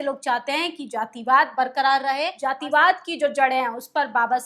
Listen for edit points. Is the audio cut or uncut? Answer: cut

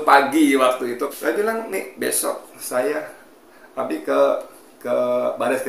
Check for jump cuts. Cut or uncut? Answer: cut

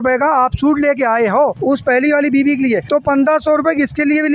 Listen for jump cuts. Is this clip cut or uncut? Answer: cut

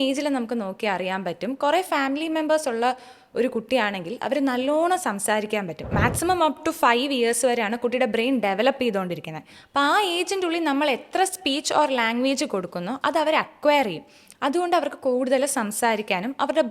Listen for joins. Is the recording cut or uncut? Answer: cut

